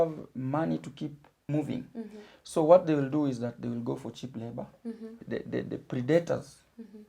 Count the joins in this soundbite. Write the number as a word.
two